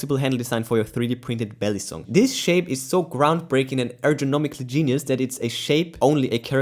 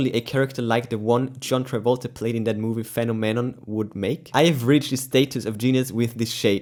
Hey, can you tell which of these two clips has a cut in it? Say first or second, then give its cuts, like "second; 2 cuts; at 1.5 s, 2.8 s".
first; 1 cut; at 1.9 s